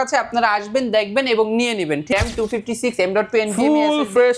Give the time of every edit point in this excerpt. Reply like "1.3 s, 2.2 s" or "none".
2.1 s